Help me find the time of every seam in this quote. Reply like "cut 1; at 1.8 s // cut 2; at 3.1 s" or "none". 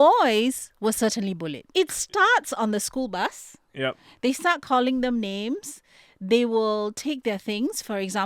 cut 1; at 1.7 s